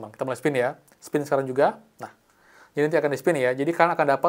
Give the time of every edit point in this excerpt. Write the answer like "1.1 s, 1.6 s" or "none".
none